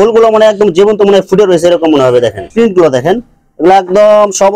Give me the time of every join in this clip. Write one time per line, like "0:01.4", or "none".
0:02.4